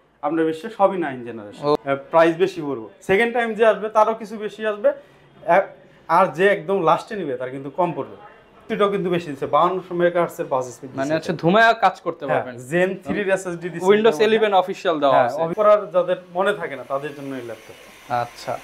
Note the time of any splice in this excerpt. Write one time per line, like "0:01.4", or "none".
0:01.8
0:08.6
0:15.5